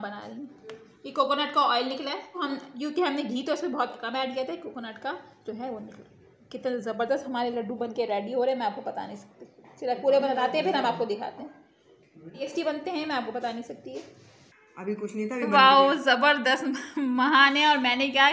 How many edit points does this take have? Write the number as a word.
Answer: two